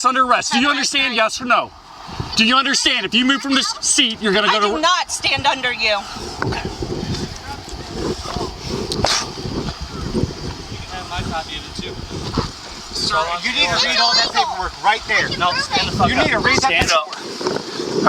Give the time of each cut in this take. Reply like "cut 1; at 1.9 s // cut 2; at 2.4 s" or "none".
none